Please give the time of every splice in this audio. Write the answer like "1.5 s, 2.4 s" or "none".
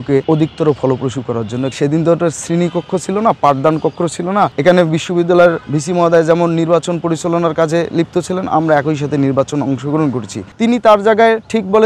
1.8 s, 10.5 s

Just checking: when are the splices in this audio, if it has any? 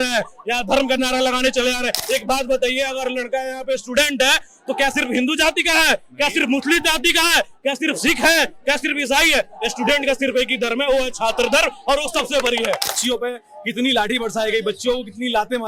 12.9 s

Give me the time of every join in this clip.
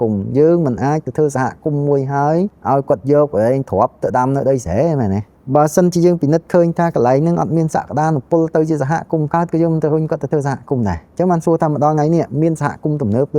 2.6 s, 5.4 s, 11.0 s

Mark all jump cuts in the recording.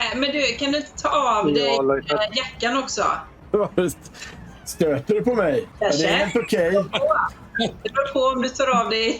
3.3 s, 5.7 s

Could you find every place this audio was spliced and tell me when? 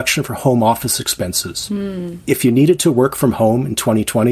2.1 s

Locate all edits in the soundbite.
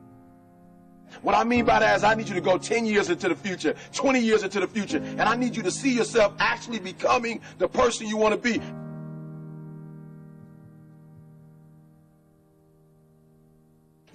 none

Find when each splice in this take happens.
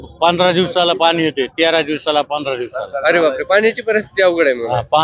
none

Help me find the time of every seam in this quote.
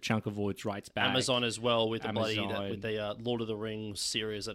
none

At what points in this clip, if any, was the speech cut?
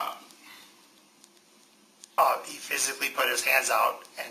2.2 s

